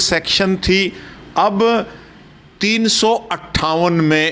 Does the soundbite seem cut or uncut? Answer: uncut